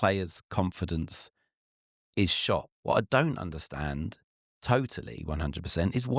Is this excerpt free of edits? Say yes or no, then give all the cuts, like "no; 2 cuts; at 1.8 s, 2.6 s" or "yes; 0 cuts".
no; 1 cut; at 2.7 s